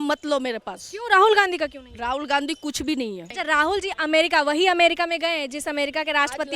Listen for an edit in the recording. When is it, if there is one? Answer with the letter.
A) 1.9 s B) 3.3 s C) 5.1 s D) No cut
B